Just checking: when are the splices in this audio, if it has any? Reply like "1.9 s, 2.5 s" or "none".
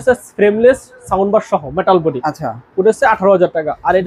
none